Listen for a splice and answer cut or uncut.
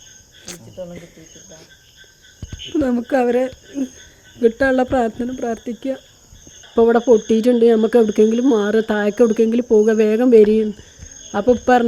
cut